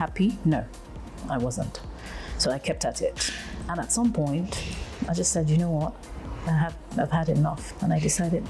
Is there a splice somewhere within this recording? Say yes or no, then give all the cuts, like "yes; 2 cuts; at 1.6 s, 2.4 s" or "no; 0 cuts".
no; 0 cuts